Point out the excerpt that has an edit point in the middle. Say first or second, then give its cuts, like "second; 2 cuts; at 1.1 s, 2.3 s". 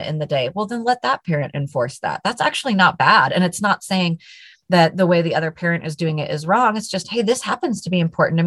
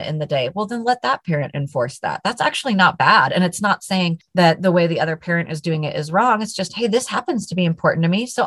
second; 1 cut; at 4.2 s